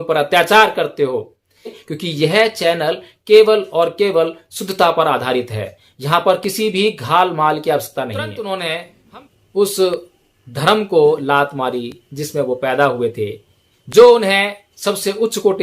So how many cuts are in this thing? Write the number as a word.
two